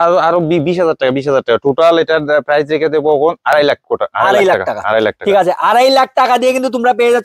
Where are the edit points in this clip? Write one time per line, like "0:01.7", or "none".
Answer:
none